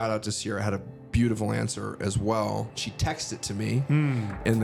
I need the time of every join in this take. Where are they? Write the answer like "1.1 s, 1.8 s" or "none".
none